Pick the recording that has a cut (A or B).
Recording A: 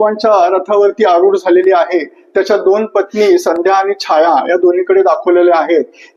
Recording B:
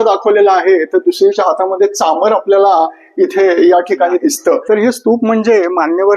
B